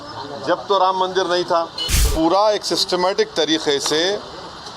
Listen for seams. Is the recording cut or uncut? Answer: cut